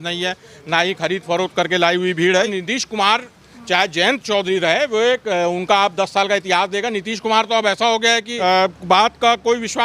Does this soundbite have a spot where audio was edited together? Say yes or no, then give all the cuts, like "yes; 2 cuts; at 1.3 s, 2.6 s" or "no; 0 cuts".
yes; 2 cuts; at 2.5 s, 8.3 s